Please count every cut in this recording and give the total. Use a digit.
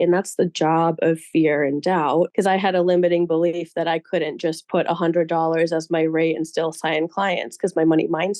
1